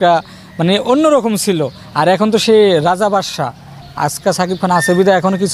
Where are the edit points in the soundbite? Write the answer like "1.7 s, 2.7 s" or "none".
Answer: 3.8 s

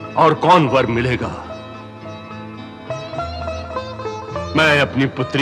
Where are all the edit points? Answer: none

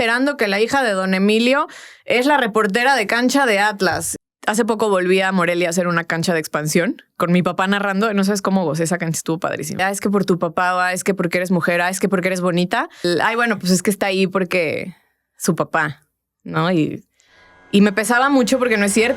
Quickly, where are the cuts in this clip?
4.1 s, 9.8 s, 13.1 s

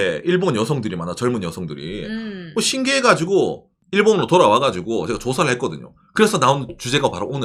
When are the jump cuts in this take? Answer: none

